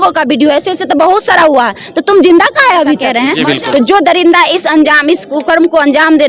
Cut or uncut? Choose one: cut